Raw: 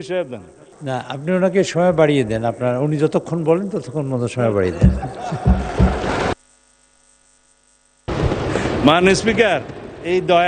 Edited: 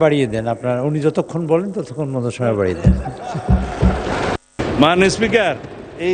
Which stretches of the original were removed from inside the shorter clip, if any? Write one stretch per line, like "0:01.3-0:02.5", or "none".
0:06.5-0:08.6